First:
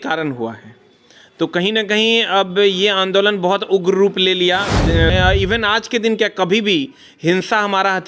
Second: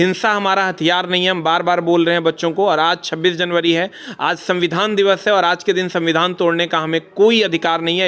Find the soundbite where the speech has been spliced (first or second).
first